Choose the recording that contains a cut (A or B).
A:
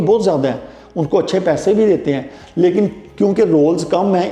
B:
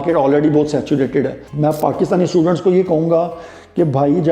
B